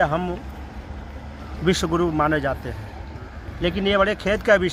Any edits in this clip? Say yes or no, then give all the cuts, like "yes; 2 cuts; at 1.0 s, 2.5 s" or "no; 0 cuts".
no; 0 cuts